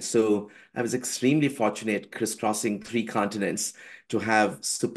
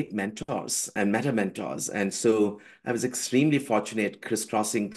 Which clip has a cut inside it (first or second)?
second